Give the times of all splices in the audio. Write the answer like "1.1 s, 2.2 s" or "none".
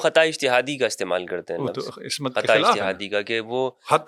none